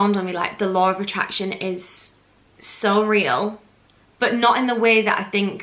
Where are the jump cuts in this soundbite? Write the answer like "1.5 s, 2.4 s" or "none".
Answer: none